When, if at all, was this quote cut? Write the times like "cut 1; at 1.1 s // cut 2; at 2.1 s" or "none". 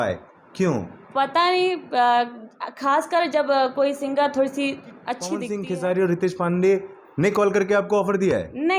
cut 1; at 5.4 s